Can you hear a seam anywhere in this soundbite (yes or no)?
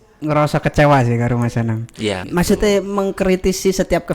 yes